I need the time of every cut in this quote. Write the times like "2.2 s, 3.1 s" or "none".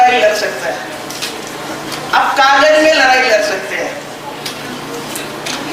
none